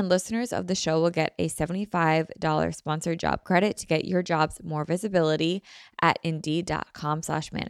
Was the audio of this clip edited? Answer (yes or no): no